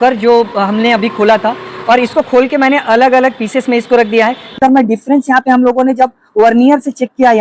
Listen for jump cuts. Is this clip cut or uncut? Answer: cut